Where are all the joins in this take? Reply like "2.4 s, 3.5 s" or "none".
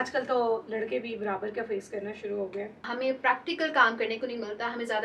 2.9 s